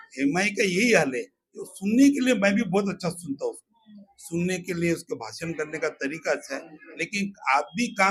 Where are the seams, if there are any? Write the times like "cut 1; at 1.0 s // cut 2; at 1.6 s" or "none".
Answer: none